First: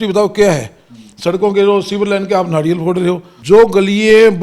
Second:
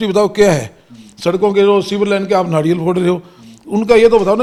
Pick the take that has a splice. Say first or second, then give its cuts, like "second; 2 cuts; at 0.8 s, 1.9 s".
first; 1 cut; at 3.3 s